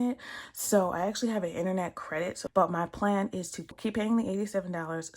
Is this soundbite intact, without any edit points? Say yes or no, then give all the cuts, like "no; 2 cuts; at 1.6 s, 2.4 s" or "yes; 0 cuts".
no; 2 cuts; at 2.4 s, 3.7 s